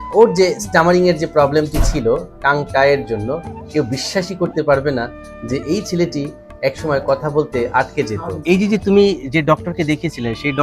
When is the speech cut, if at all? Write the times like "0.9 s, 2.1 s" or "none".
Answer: 3.6 s, 8.3 s